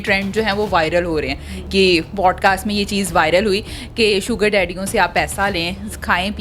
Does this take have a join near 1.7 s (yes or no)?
yes